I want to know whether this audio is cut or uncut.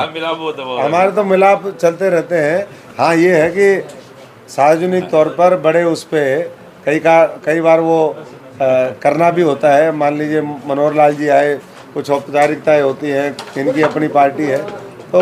uncut